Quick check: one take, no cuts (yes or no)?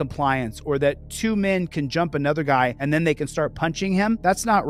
yes